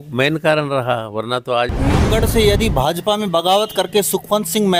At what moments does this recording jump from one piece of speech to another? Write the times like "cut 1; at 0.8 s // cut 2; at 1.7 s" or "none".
cut 1; at 2.0 s